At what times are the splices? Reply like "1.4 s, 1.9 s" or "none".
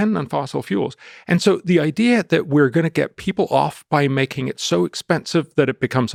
none